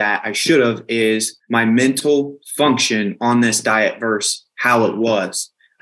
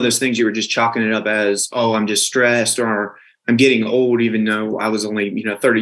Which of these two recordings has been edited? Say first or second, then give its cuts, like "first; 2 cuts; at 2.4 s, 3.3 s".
first; 1 cut; at 1.3 s